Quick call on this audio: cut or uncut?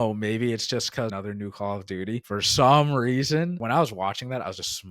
cut